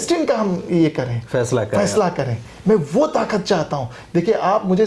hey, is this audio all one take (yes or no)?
yes